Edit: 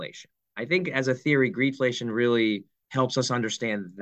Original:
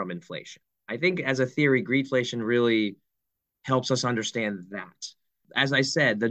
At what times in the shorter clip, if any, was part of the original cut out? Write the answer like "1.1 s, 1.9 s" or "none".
2.8 s